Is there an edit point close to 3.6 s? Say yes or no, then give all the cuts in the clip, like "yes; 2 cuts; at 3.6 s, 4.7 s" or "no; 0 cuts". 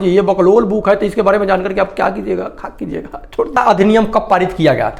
yes; 1 cut; at 3.6 s